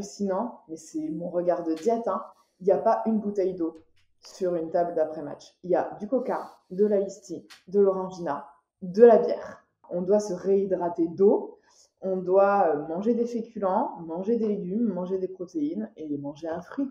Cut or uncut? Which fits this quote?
cut